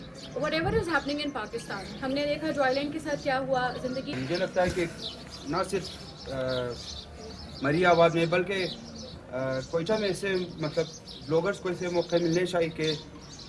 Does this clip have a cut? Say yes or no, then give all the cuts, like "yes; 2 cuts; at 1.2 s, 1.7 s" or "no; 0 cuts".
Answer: yes; 1 cut; at 4.2 s